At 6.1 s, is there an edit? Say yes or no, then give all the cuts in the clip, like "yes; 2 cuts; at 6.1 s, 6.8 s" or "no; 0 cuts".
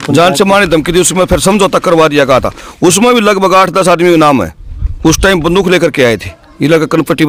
no; 0 cuts